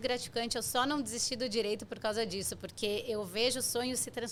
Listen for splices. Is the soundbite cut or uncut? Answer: uncut